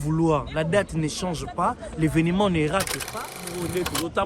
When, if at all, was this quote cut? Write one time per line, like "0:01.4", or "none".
0:03.1